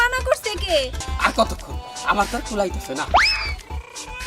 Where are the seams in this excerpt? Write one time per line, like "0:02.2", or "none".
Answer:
0:01.0